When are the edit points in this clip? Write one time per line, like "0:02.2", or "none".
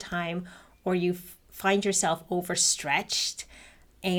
none